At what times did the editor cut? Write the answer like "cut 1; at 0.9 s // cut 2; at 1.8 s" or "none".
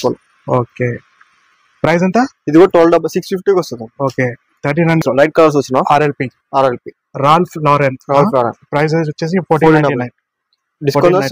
cut 1; at 5.0 s